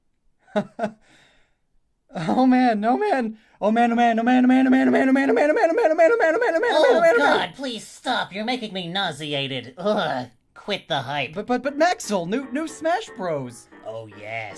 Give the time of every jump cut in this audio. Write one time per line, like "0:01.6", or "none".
0:11.3

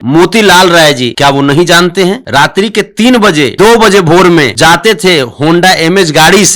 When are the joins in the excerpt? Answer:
0:01.1
0:02.2
0:03.5
0:04.5

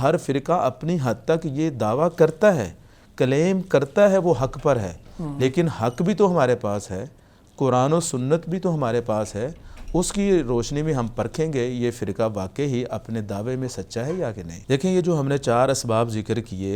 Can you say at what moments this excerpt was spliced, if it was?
none

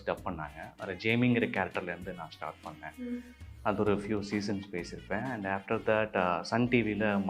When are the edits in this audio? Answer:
none

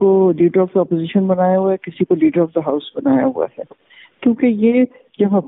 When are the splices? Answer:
none

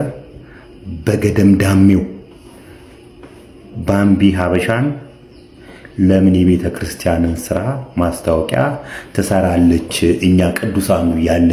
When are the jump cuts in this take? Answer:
none

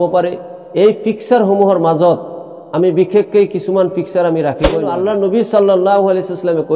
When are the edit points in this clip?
0:04.9

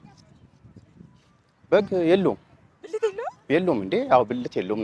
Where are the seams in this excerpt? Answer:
none

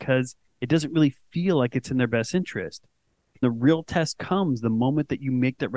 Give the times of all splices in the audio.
0:03.4

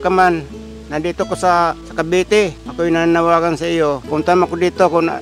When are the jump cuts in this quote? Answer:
0:01.8
0:02.6
0:04.0

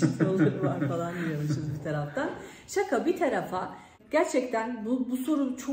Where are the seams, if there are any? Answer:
0:03.9

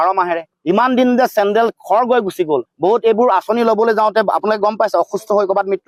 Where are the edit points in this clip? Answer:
none

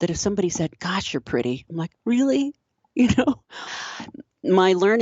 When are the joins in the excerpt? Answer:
0:03.7

